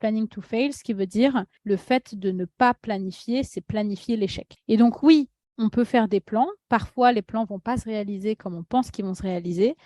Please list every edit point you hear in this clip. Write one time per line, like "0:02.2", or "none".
0:01.5
0:04.4